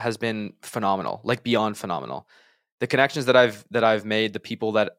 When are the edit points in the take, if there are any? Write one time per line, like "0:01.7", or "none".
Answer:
none